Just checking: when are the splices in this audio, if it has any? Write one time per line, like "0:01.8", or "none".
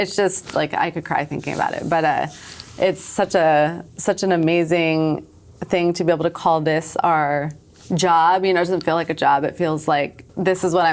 none

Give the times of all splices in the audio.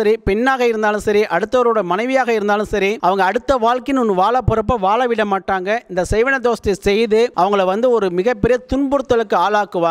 0:03.0
0:07.3

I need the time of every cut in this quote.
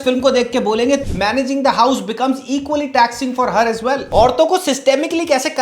0:01.0
0:04.0

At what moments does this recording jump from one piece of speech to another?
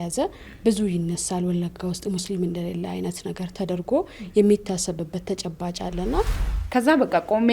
0:06.5

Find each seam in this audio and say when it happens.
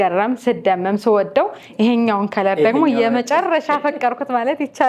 none

